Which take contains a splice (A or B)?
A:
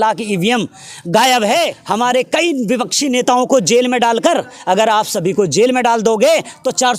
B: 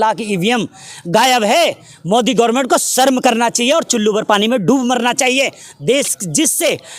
A